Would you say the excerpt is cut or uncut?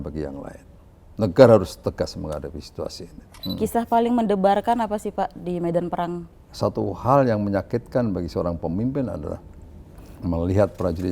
cut